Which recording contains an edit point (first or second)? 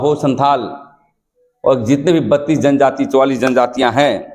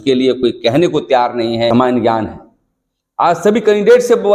second